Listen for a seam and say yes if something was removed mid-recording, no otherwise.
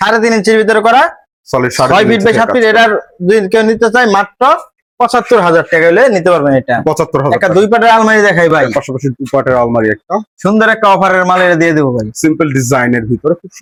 no